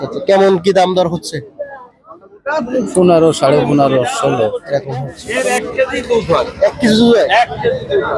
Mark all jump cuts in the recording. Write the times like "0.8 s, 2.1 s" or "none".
5.2 s